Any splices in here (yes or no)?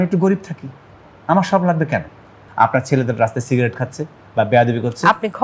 yes